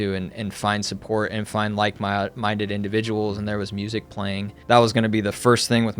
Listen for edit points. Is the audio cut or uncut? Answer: cut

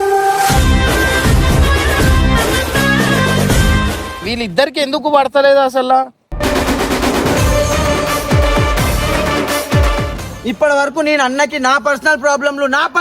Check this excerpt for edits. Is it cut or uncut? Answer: cut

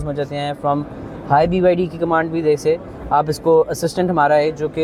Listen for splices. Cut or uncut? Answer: uncut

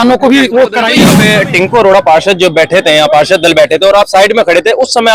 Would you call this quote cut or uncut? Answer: cut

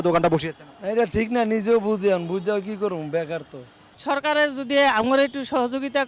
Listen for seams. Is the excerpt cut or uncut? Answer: uncut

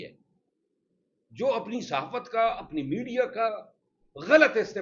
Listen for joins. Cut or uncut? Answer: uncut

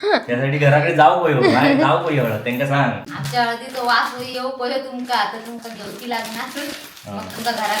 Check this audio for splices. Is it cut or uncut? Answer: cut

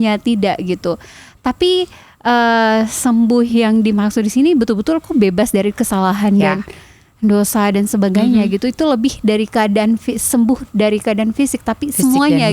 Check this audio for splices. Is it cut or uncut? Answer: uncut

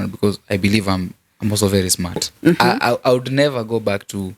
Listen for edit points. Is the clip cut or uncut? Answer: cut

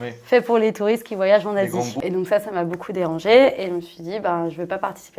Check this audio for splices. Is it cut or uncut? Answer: cut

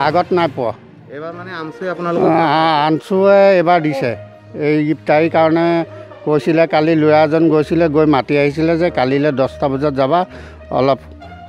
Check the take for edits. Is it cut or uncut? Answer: uncut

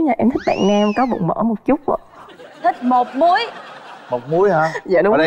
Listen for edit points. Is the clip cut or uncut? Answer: uncut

